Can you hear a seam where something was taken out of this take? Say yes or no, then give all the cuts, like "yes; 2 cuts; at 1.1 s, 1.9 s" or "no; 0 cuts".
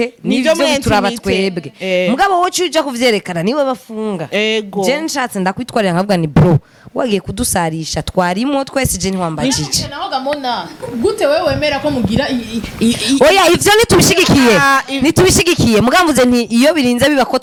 no; 0 cuts